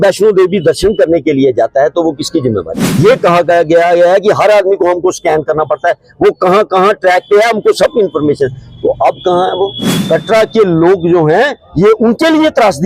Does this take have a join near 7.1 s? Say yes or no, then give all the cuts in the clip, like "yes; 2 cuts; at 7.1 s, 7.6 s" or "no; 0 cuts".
no; 2 cuts; at 2.8 s, 9.9 s